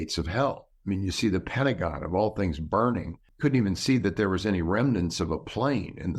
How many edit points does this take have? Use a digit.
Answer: 1